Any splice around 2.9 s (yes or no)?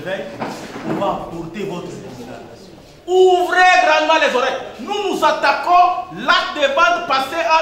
yes